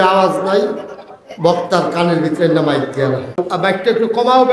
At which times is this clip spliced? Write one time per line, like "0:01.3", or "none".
0:03.4

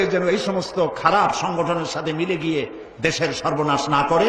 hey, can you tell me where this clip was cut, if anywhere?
none

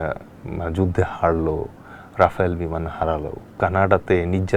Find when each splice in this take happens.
0:03.4

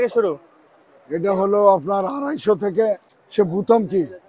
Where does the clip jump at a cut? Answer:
0:03.1

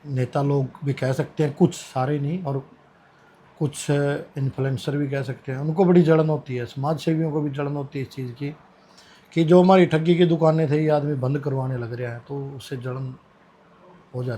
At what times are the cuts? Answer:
none

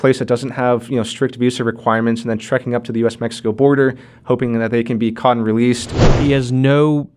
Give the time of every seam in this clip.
0:06.0

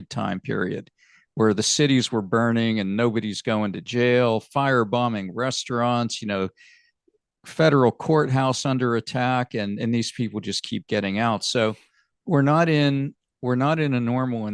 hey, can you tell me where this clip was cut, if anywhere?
none

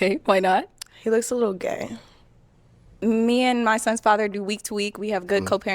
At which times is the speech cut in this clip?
0:03.0

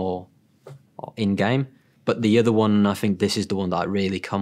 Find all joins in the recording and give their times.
0:01.9

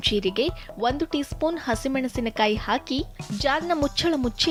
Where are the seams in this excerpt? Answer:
none

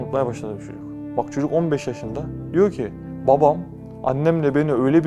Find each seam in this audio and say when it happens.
0:02.4

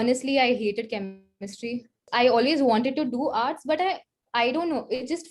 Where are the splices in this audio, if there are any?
0:02.0

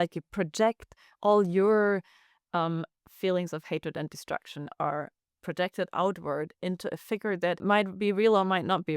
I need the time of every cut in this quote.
0:07.6

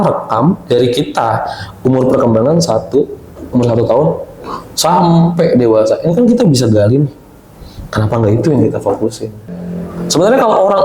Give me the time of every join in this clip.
0:09.5

